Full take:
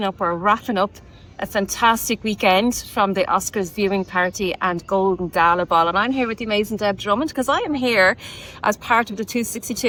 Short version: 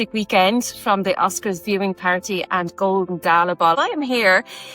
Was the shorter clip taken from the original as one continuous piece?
no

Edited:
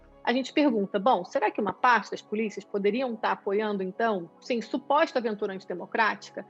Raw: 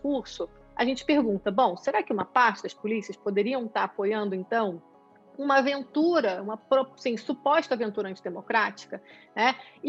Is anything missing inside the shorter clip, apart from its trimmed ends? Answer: yes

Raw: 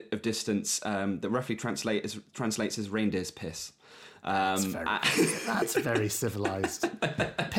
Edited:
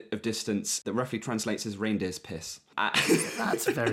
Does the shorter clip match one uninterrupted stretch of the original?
no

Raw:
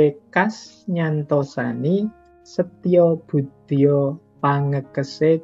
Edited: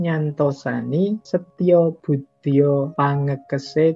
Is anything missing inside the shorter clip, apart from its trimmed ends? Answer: yes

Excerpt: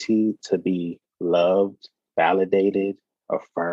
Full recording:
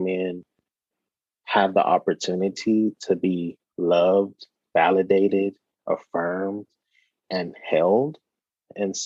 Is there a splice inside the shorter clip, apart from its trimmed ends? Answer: no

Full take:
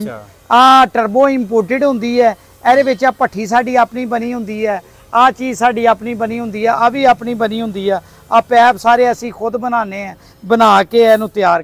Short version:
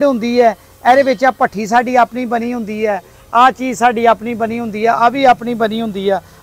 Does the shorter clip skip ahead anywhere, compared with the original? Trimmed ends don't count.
no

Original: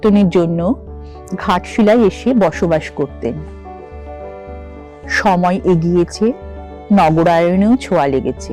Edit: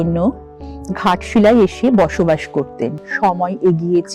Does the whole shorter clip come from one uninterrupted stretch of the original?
no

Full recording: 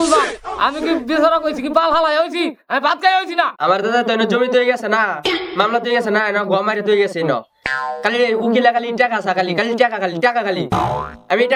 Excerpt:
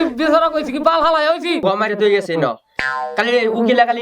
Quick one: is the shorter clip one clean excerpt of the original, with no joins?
no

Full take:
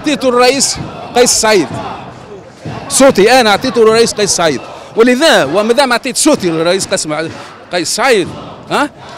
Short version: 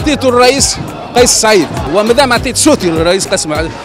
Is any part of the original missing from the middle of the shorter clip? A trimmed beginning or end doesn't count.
yes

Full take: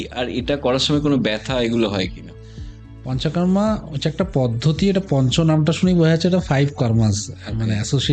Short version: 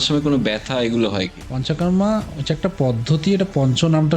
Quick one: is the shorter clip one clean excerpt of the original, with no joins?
no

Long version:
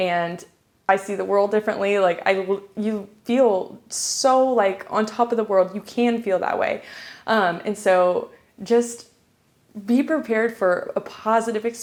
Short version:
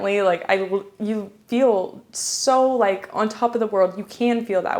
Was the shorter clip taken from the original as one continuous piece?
yes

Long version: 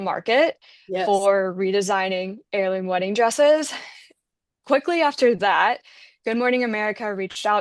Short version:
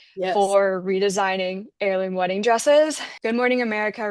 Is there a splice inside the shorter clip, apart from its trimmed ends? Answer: yes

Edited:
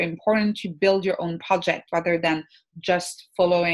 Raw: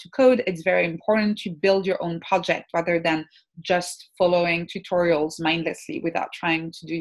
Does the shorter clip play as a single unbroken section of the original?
yes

